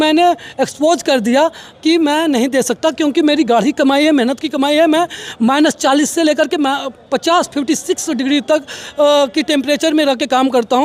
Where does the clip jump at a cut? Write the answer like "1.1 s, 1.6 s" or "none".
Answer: none